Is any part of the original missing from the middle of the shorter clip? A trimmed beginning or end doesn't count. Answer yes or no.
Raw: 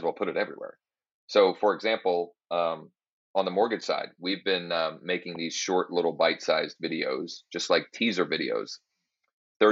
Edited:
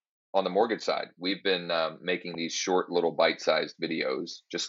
no